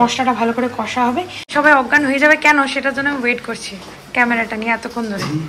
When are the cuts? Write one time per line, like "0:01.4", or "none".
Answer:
0:01.5